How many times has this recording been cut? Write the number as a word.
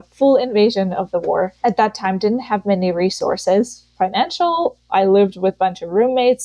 one